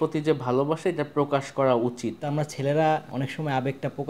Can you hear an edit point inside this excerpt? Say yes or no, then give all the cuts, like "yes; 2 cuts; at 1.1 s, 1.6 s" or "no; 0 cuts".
yes; 2 cuts; at 2.2 s, 3.1 s